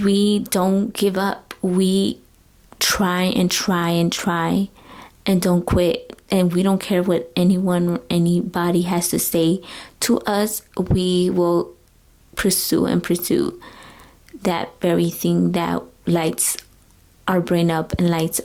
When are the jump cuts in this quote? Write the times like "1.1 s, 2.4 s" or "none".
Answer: none